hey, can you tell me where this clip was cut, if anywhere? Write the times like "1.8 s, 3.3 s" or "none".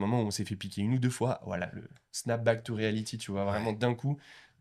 none

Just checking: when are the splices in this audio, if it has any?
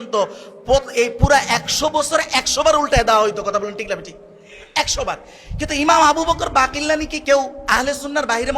none

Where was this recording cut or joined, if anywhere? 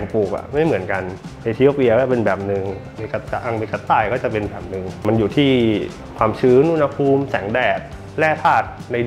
none

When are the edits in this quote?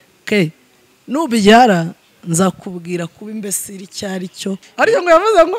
4.6 s

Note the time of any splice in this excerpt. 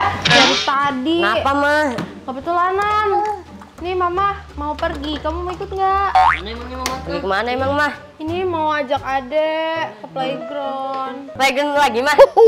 11.2 s

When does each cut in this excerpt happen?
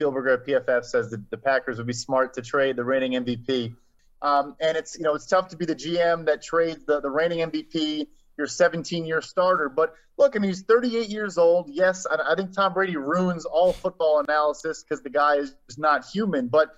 3.9 s

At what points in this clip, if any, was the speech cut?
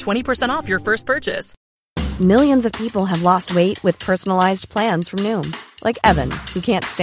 1.5 s

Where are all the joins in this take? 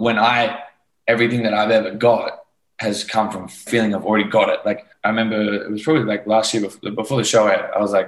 3.7 s, 4.9 s

